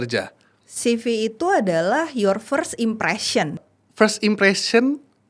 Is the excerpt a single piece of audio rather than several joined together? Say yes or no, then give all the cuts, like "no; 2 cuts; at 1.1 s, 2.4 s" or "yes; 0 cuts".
no; 1 cut; at 3.6 s